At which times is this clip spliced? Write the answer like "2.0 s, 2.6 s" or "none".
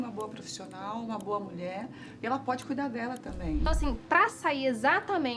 3.6 s